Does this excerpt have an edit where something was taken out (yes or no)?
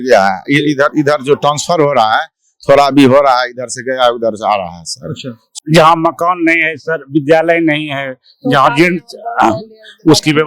yes